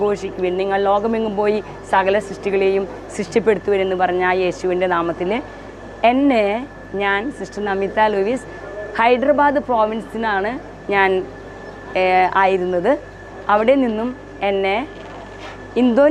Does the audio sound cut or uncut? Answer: uncut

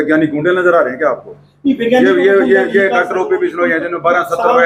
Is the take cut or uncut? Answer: uncut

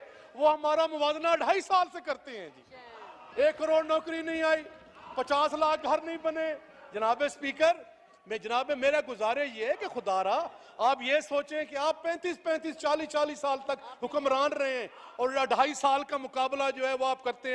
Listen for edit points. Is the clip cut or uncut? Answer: uncut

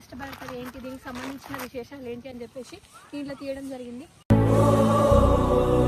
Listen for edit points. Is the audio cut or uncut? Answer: uncut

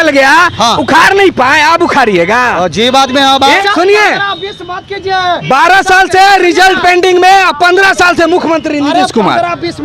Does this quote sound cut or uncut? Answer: cut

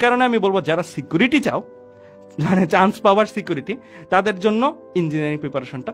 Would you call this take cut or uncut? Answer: uncut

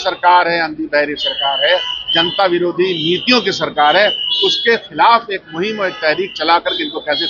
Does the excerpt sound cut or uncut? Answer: uncut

